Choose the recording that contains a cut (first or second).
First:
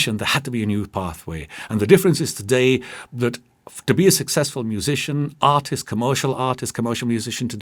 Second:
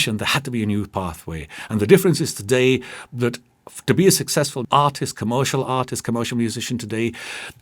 second